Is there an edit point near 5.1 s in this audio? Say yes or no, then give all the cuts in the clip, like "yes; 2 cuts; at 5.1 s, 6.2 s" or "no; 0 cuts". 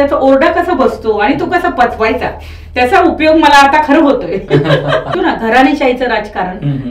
yes; 1 cut; at 5.1 s